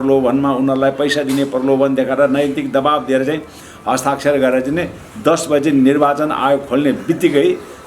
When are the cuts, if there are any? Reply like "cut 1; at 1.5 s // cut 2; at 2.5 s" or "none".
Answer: none